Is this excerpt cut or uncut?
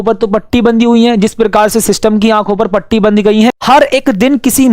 cut